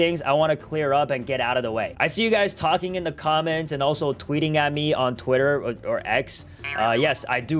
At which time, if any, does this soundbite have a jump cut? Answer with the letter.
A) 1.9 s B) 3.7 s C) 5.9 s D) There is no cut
A